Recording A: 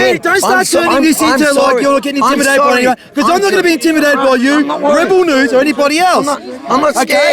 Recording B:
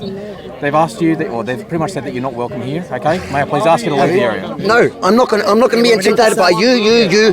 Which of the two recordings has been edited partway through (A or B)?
B